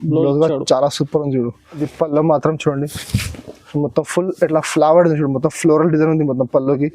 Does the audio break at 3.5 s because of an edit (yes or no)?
no